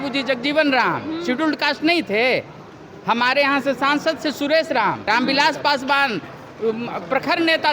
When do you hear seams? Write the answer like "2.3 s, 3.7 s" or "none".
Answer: 5.1 s